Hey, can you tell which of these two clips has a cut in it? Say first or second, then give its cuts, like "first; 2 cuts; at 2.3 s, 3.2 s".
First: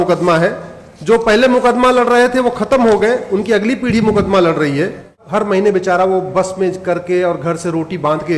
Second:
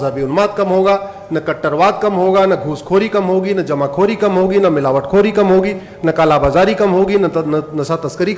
first; 1 cut; at 5.2 s